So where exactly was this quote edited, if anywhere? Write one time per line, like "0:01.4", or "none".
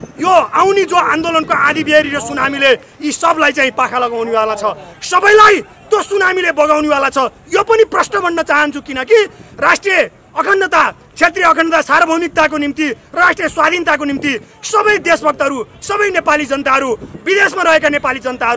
none